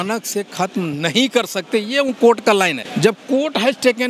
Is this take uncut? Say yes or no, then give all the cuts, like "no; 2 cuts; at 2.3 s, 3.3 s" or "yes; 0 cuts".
no; 1 cut; at 2.8 s